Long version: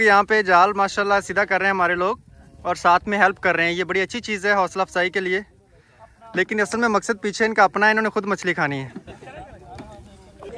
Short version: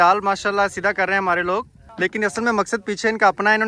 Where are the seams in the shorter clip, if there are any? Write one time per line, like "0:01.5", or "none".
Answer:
0:01.8